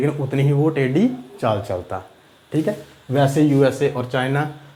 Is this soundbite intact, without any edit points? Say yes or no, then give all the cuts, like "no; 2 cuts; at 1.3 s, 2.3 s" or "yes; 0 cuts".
yes; 0 cuts